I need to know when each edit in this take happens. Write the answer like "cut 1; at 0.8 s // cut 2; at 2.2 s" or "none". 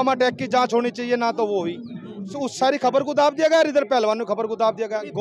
cut 1; at 2.3 s